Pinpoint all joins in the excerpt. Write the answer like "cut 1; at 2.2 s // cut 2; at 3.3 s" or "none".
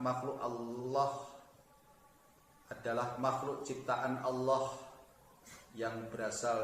none